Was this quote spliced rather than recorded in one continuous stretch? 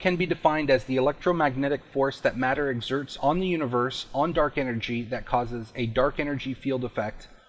no; 0 cuts

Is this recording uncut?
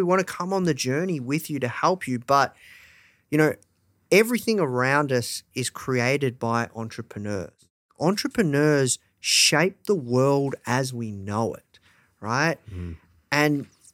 no; 1 cut; at 7.9 s

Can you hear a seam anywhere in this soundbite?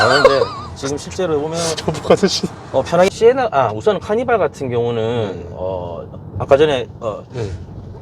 yes; 1 cut; at 3.1 s

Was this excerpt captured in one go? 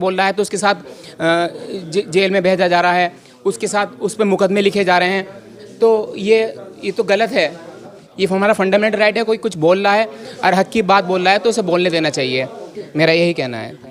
yes; 0 cuts

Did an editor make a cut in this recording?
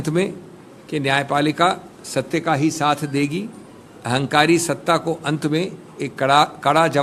no; 0 cuts

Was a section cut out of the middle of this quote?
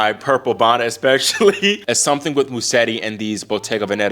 yes; 1 cut; at 1.9 s

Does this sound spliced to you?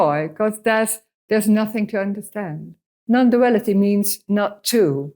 yes; 1 cut; at 2.9 s

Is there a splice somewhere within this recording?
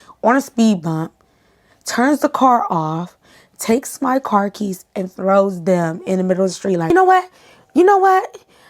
yes; 1 cut; at 6.8 s

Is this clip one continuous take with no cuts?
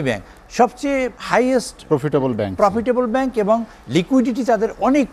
no; 1 cut; at 1.2 s

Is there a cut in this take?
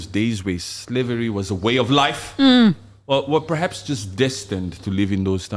no; 0 cuts

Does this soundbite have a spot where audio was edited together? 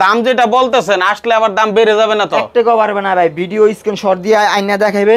no; 0 cuts

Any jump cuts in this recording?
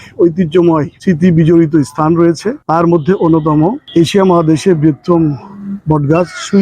yes; 3 cuts; at 0.9 s, 2.5 s, 3.8 s

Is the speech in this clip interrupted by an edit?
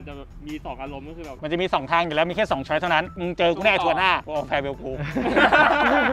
yes; 1 cut; at 1.3 s

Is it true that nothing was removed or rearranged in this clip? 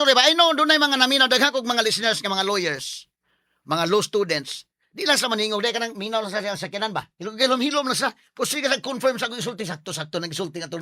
yes; 0 cuts

